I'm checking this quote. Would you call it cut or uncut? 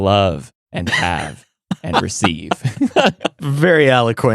cut